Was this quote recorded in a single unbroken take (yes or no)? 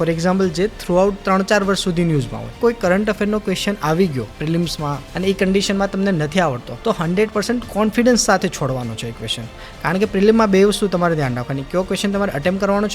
no